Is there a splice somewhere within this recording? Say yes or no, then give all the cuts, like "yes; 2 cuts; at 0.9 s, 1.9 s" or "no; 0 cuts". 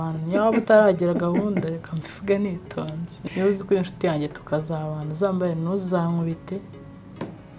yes; 1 cut; at 3.2 s